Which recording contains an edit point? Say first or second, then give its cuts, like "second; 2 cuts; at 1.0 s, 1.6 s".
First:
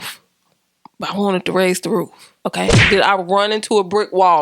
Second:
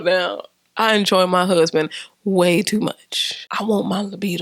first; 1 cut; at 2.8 s